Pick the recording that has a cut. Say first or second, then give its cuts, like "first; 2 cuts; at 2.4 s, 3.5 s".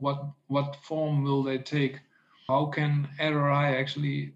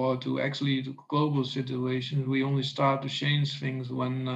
first; 1 cut; at 2.4 s